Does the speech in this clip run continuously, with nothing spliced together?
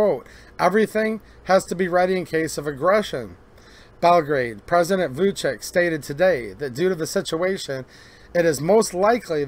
yes; 0 cuts

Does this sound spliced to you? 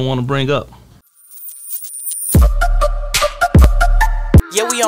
yes; 1 cut; at 1.1 s

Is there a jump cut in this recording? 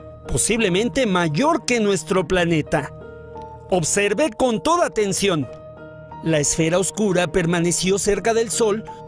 yes; 1 cut; at 6.1 s

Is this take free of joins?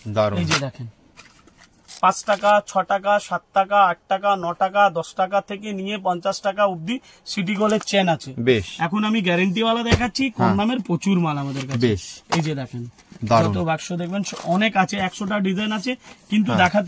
no; 1 cut; at 1.8 s

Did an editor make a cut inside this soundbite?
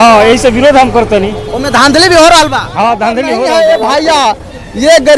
yes; 1 cut; at 3.4 s

